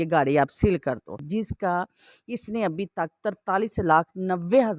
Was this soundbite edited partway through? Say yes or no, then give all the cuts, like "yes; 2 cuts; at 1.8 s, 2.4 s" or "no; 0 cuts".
yes; 1 cut; at 1.2 s